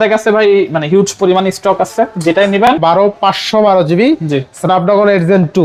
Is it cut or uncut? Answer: cut